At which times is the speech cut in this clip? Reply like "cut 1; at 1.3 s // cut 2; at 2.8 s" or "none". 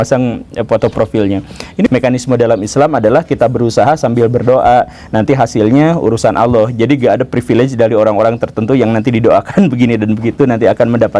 cut 1; at 1.9 s